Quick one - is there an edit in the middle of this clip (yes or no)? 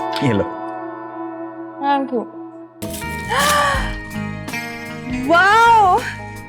yes